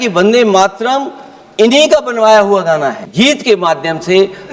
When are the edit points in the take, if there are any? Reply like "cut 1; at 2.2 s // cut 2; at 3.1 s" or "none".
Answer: cut 1; at 3.0 s